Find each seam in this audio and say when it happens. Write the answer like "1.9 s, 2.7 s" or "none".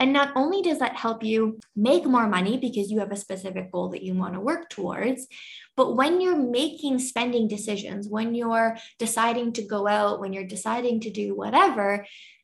1.6 s